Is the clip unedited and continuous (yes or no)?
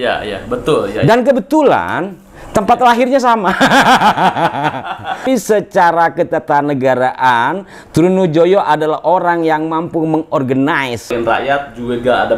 no